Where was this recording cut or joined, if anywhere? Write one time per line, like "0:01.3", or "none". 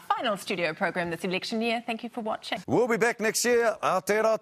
0:02.5

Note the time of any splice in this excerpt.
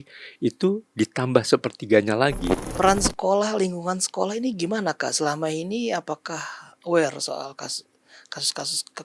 0:02.6

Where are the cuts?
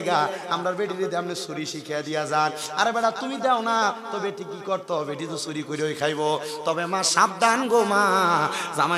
none

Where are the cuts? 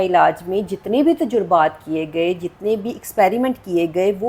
none

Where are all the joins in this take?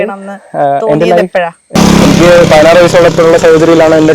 0:01.7

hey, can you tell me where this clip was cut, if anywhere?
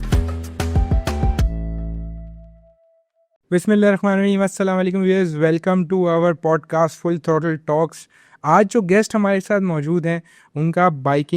none

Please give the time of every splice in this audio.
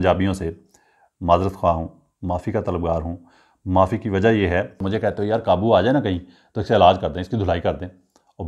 0:04.8

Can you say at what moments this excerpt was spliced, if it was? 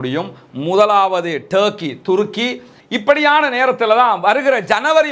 0:02.8

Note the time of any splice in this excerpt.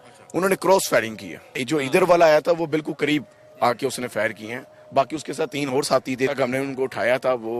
0:01.6
0:06.3

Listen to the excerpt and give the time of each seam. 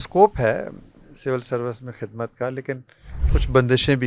0:03.1

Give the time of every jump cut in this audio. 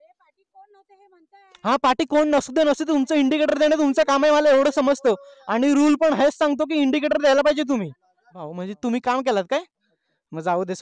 0:08.4

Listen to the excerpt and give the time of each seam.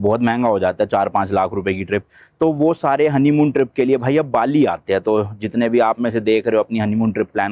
none

